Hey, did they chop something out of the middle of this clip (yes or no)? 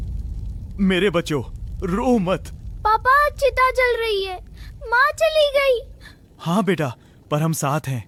no